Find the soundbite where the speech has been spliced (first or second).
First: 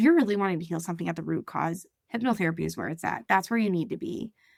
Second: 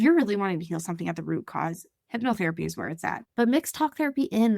second